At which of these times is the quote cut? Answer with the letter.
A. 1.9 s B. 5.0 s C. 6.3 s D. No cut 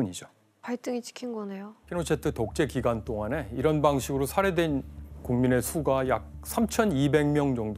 A